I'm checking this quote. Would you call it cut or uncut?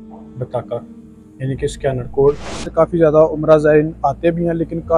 cut